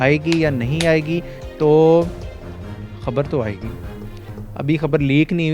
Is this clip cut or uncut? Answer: uncut